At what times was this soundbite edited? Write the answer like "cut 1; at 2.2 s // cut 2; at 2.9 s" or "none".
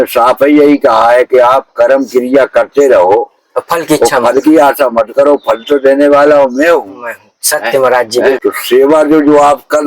cut 1; at 8.4 s